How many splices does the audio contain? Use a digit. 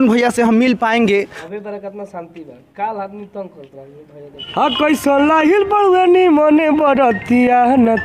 2